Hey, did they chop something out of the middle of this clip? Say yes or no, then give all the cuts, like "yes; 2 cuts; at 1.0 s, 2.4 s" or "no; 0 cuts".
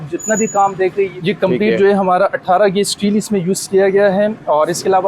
yes; 1 cut; at 1.1 s